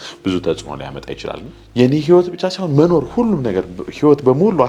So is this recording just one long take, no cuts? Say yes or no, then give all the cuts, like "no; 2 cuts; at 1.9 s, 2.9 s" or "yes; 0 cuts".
no; 1 cut; at 1.5 s